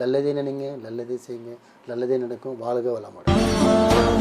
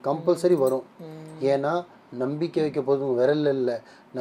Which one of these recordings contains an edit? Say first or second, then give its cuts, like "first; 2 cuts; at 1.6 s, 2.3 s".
first; 1 cut; at 3.1 s